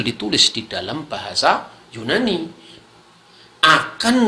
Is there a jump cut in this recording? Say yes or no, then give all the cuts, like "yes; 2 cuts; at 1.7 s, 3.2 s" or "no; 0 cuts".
yes; 1 cut; at 2.7 s